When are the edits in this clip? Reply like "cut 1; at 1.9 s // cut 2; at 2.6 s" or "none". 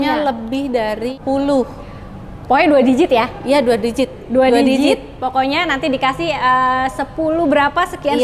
cut 1; at 1.2 s